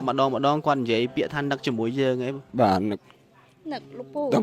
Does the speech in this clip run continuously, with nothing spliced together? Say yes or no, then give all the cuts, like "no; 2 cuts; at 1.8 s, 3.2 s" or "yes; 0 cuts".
yes; 0 cuts